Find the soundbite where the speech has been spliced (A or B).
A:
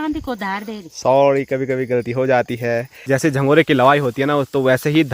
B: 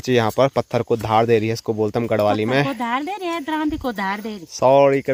A